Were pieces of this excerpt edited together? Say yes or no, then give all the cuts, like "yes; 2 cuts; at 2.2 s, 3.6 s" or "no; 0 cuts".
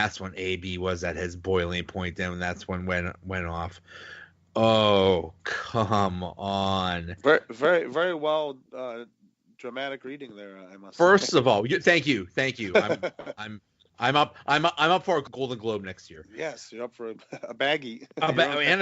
yes; 1 cut; at 15.2 s